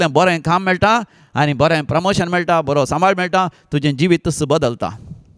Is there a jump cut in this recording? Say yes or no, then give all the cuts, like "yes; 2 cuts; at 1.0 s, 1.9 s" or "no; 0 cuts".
no; 0 cuts